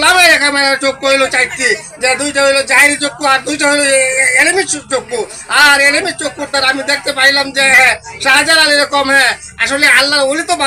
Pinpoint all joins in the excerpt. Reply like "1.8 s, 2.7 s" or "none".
none